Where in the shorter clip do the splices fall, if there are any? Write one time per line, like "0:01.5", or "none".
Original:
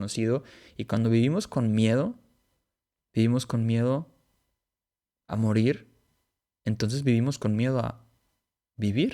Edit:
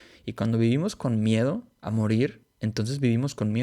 0:01.7
0:02.5